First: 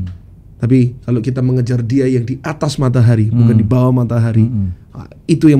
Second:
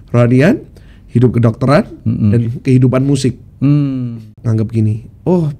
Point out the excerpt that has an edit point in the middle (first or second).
second